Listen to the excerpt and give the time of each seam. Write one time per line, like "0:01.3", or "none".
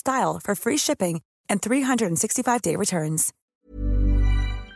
0:03.3